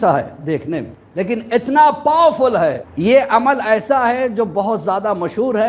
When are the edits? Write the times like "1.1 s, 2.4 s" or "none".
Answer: 1.0 s, 2.9 s